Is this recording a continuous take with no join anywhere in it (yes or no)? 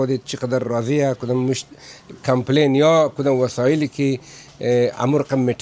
yes